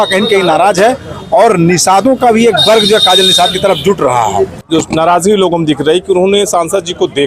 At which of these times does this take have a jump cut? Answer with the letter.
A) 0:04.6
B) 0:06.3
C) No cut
A